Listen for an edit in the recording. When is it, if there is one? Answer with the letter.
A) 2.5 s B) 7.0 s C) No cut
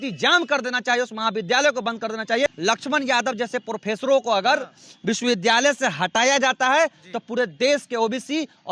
A